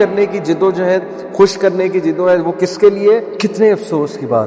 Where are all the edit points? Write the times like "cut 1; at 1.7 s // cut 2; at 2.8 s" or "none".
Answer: cut 1; at 3.4 s